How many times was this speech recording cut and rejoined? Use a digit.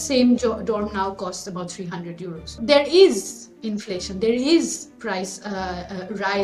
1